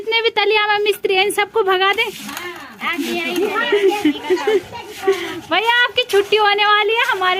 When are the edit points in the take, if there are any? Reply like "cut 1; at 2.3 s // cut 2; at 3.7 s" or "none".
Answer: none